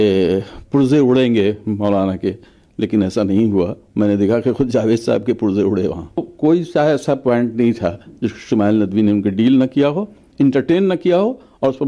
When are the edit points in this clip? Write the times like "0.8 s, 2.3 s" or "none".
6.3 s